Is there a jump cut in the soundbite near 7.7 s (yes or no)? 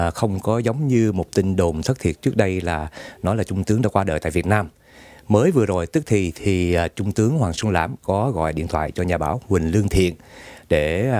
yes